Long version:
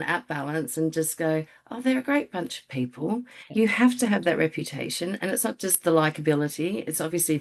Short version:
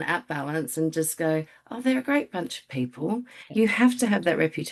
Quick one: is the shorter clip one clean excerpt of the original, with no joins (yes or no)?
yes